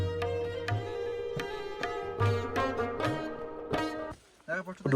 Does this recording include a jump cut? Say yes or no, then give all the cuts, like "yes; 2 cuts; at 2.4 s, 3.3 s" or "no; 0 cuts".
no; 0 cuts